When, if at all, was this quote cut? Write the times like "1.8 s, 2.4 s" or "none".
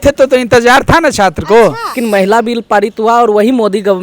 2.0 s